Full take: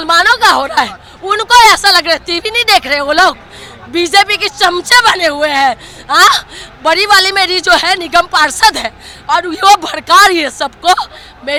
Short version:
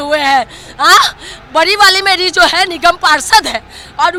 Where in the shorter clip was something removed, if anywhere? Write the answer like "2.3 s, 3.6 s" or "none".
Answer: none